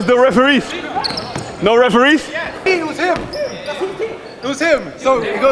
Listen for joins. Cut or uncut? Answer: cut